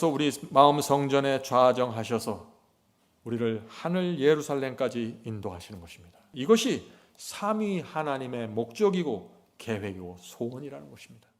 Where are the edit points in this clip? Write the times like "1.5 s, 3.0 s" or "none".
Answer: 6.2 s